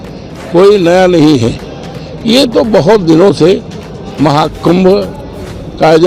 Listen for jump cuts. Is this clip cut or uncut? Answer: uncut